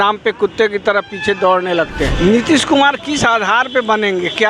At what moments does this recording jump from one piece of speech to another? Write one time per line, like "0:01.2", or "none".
0:02.1